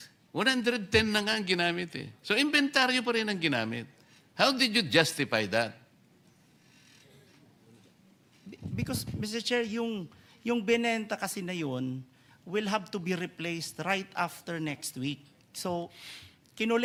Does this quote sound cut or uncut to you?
uncut